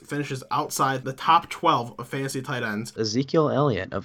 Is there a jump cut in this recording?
yes; 1 cut; at 2.9 s

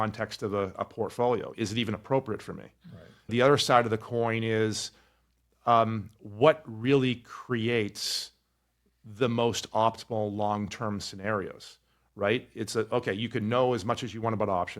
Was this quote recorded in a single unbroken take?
no; 1 cut; at 3.3 s

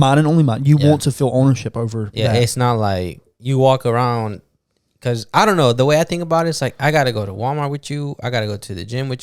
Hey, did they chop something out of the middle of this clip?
no; 0 cuts

